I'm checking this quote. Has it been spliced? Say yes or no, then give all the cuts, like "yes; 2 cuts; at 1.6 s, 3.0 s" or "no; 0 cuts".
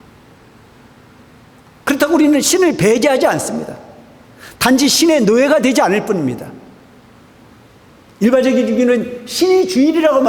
no; 0 cuts